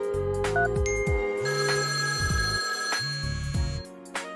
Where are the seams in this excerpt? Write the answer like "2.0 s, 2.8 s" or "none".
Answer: none

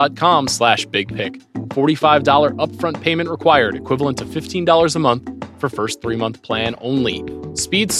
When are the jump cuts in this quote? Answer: none

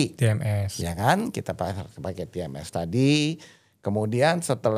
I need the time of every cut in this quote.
none

